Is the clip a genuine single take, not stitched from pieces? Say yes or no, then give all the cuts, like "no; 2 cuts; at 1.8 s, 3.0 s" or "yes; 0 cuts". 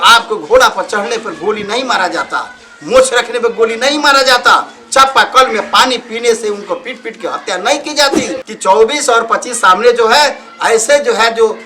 no; 1 cut; at 8.4 s